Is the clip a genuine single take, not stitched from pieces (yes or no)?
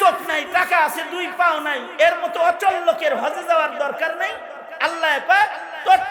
yes